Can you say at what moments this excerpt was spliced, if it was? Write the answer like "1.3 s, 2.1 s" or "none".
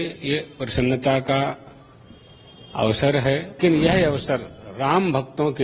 3.6 s